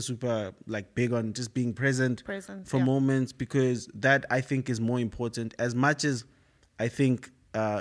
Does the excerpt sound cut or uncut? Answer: uncut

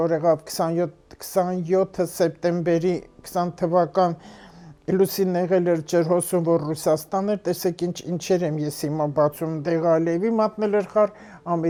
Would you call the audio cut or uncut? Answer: uncut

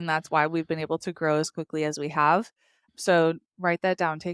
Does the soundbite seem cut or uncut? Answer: uncut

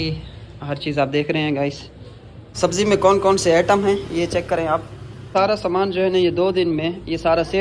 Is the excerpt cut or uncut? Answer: cut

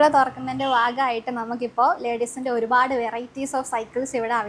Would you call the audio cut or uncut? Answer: uncut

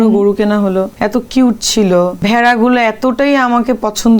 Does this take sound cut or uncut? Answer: cut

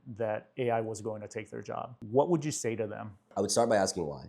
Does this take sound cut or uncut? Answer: cut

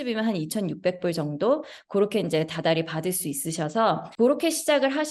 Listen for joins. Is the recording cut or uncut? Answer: uncut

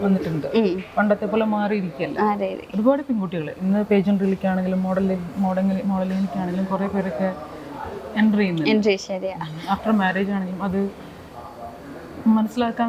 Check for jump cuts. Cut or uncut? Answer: uncut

